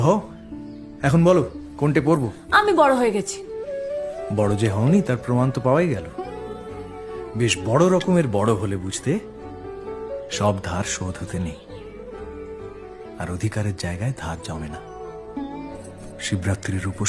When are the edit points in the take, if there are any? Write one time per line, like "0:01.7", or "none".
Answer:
none